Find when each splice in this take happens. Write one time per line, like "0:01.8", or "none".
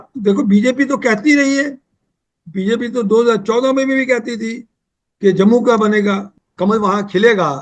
0:06.3

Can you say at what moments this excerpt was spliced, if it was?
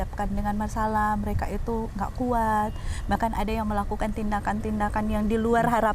none

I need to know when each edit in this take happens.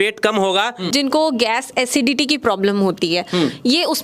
0:00.9

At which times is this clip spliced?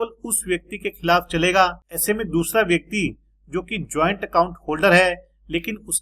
0:01.9

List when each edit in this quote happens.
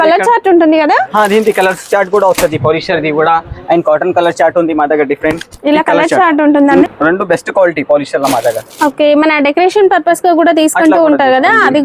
0:06.8

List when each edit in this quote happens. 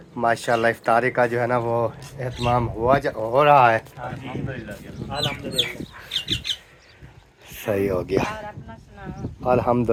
none

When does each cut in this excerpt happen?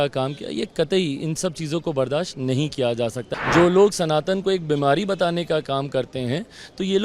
0:03.3

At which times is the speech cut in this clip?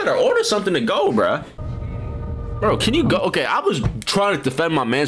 0:01.6

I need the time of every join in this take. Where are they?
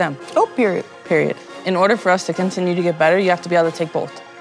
0:01.5

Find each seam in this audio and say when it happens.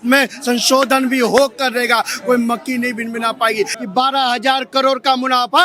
0:03.8

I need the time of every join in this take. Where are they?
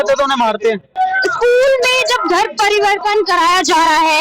0:00.9

